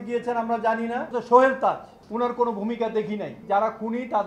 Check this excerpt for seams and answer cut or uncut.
cut